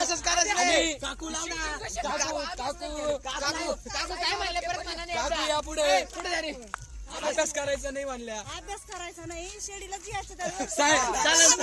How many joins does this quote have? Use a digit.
0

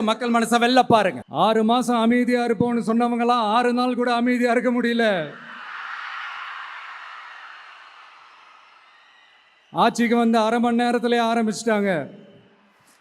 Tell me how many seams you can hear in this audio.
1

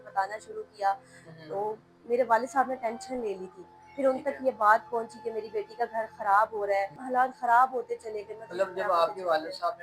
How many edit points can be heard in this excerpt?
1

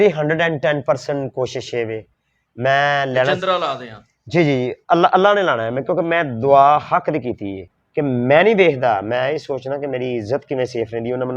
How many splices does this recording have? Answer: 1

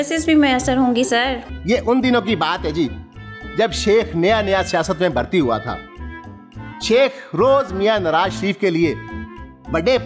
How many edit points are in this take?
1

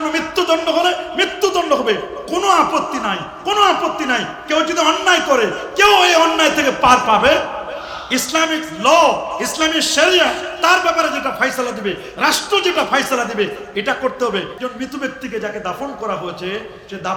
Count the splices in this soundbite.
1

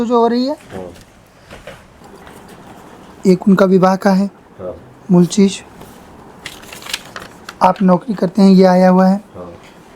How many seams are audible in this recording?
1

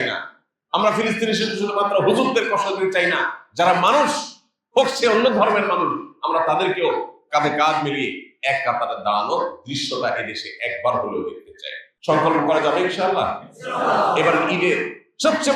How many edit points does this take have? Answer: 1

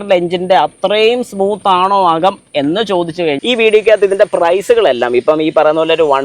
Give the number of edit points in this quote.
1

